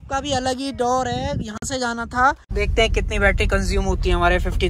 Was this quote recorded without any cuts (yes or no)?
no